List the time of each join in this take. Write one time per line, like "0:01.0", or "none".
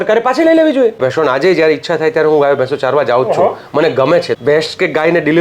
0:01.0
0:04.3